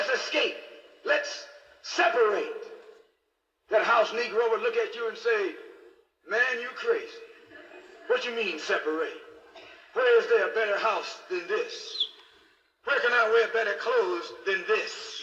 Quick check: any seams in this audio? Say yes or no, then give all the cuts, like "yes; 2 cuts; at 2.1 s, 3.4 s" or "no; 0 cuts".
no; 0 cuts